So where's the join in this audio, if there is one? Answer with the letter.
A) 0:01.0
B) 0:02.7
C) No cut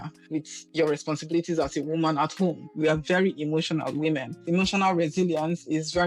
B